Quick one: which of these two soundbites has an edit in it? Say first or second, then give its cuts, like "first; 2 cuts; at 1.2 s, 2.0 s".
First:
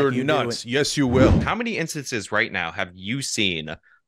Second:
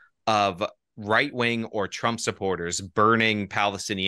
first; 1 cut; at 1.4 s